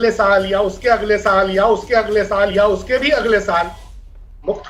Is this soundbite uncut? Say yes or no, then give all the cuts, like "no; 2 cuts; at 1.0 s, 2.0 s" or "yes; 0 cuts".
yes; 0 cuts